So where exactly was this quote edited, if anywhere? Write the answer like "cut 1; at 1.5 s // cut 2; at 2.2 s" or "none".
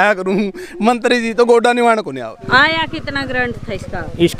cut 1; at 2.4 s